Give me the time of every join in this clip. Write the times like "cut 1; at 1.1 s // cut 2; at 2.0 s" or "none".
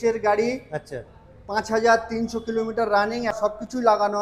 cut 1; at 3.3 s